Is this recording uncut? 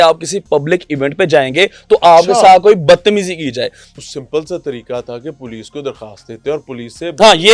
no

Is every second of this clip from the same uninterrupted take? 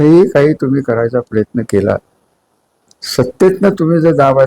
yes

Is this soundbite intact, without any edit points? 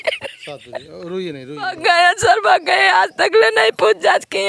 no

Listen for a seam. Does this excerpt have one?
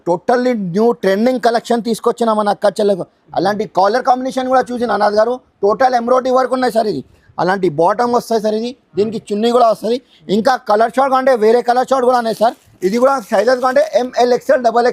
no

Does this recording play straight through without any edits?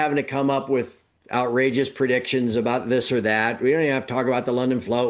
yes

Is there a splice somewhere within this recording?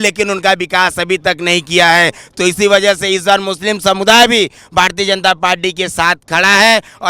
no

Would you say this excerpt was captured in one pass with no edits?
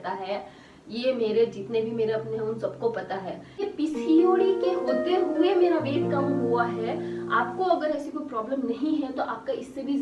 no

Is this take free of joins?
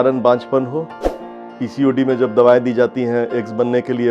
no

